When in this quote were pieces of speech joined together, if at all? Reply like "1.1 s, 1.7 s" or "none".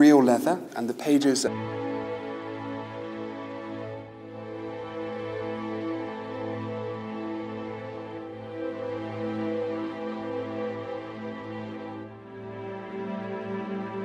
none